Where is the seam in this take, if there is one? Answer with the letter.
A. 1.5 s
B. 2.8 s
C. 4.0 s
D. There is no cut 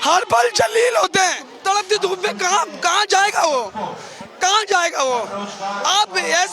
A